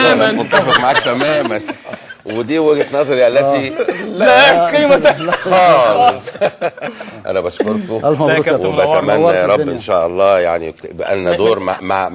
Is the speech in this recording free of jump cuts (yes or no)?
no